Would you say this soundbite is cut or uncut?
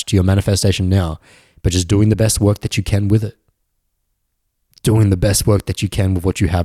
uncut